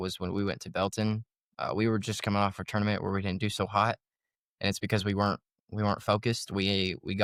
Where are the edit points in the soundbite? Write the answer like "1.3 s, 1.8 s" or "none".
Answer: none